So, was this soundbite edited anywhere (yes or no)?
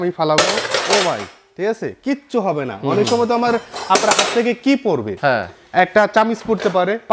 no